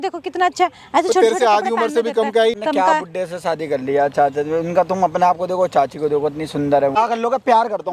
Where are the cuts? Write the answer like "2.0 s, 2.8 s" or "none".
2.5 s, 6.9 s